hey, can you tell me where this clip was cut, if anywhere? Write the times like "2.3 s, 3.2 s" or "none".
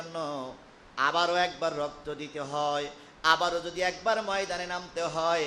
none